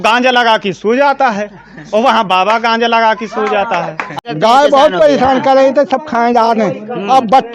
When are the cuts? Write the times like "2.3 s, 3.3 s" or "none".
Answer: 4.2 s